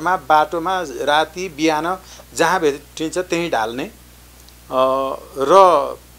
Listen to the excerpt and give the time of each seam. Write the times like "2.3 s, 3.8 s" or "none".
none